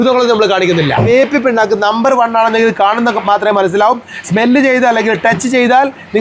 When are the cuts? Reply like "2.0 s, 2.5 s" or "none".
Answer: 1.1 s